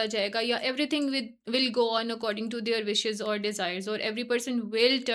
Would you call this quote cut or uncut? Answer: uncut